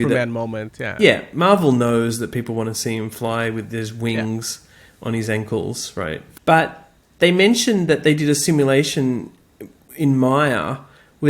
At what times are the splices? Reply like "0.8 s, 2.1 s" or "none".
6.3 s